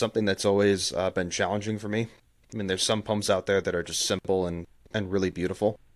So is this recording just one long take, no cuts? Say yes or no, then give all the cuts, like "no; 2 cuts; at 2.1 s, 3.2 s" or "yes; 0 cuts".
yes; 0 cuts